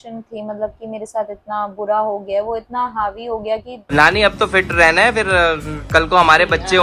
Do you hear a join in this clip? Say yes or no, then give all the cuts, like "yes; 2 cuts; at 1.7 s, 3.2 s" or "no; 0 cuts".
yes; 1 cut; at 3.8 s